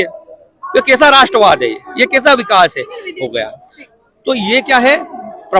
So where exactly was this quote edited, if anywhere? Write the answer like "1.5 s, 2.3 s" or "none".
3.1 s